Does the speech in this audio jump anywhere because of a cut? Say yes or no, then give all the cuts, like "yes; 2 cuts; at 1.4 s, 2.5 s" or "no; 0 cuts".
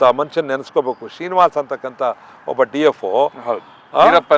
no; 0 cuts